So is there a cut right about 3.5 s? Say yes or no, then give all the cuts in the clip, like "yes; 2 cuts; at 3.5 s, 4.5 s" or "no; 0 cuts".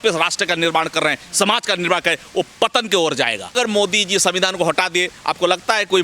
yes; 1 cut; at 3.5 s